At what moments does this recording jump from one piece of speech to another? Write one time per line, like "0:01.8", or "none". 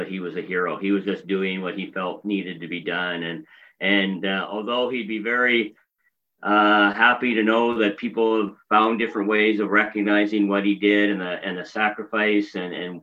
none